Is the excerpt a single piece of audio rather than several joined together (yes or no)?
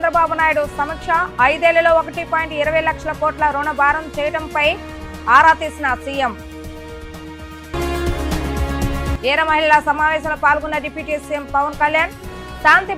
yes